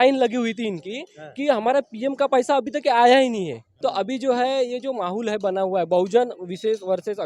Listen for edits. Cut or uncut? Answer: cut